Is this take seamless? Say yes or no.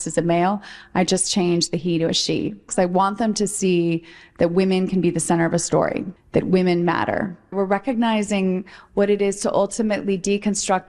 yes